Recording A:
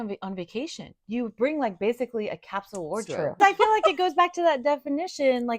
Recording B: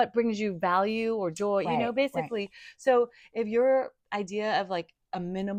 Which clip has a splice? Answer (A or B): A